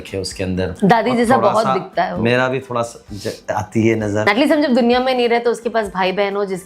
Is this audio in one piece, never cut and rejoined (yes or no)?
no